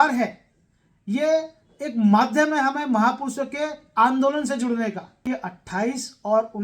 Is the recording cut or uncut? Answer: cut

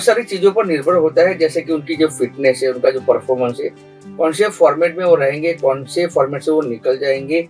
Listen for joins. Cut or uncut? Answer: uncut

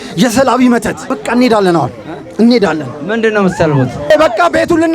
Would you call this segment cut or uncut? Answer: cut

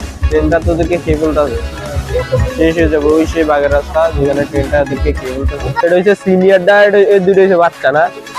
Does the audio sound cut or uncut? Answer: cut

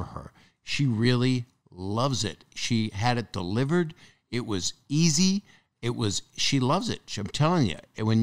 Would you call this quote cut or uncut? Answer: uncut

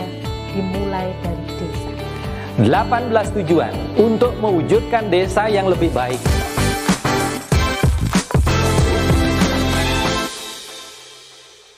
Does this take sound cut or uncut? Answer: cut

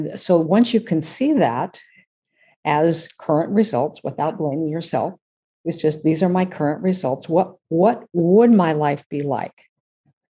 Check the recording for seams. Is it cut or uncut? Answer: uncut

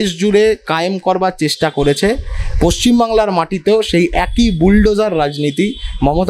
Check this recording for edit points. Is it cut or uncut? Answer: uncut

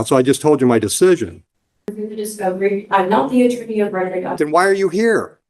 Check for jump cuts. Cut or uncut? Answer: cut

